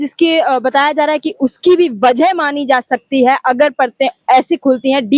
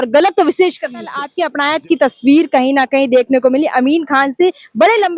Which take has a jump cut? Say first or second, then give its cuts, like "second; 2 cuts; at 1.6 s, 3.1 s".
second; 1 cut; at 1.3 s